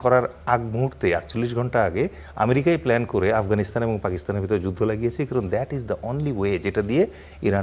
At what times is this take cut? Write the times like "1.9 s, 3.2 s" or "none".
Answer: none